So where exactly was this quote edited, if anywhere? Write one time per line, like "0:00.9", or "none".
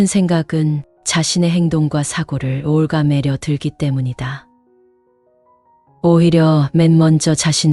none